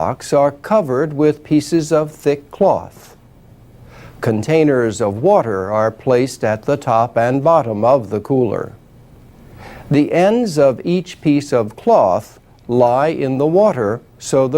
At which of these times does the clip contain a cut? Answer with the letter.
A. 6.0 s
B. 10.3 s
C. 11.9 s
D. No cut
B